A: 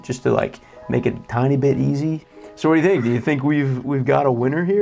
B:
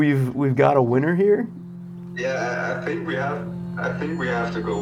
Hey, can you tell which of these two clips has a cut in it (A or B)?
A